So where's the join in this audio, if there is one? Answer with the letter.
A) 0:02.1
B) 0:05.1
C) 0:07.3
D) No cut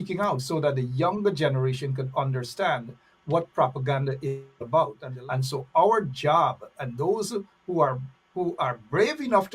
B